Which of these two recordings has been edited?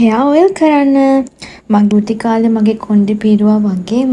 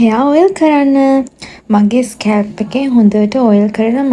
first; 1 cut; at 1.9 s

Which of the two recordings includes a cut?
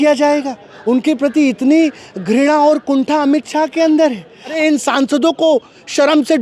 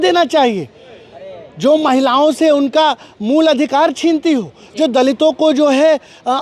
first; 1 cut; at 4.6 s

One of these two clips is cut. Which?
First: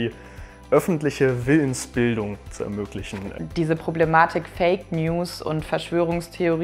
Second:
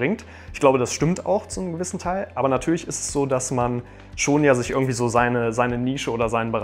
first; 1 cut; at 3.3 s

